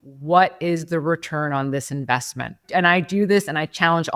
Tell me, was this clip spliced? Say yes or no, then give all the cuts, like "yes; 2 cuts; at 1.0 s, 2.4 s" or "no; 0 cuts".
no; 0 cuts